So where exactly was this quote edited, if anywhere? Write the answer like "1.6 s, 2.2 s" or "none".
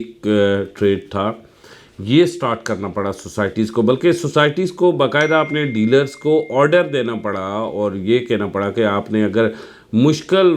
none